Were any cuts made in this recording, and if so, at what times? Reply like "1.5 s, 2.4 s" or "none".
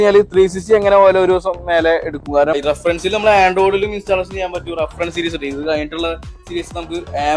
2.6 s